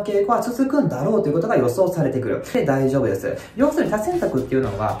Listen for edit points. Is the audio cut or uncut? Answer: cut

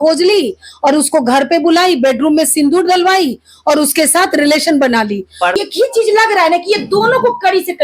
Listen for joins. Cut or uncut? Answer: cut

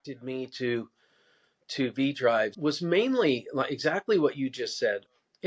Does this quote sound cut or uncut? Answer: uncut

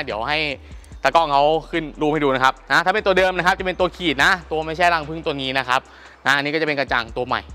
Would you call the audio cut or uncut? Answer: uncut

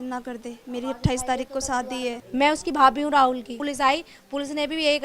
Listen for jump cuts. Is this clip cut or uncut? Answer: cut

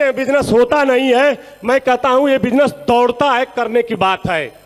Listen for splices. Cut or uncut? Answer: uncut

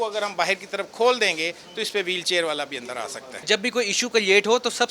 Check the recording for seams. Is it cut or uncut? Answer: cut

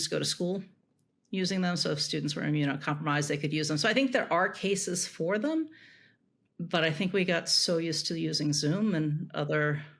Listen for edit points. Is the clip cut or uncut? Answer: uncut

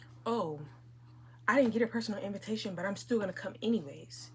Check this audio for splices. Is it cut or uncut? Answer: uncut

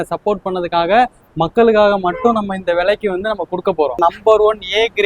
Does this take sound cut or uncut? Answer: cut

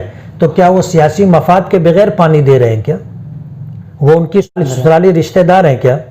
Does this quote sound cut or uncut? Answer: cut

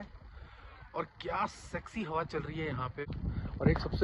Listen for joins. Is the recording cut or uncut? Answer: cut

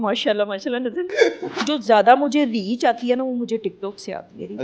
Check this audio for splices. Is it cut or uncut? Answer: cut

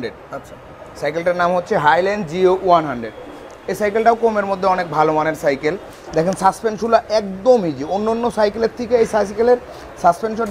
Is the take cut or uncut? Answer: uncut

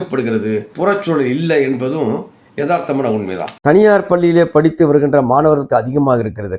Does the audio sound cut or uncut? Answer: cut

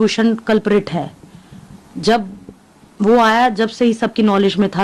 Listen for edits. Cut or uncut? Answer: uncut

